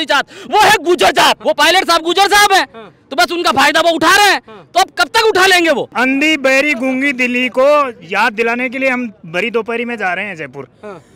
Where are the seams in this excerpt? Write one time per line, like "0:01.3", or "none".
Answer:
0:01.4
0:05.9